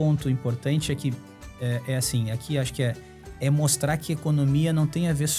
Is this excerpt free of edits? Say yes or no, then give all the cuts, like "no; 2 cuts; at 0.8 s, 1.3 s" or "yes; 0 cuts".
yes; 0 cuts